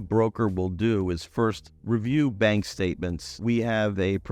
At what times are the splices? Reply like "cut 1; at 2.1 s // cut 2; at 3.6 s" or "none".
cut 1; at 1.7 s // cut 2; at 3.3 s